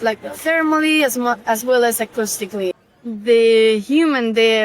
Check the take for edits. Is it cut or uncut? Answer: cut